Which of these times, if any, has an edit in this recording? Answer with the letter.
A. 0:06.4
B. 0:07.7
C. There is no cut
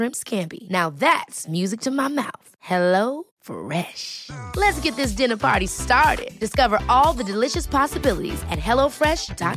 C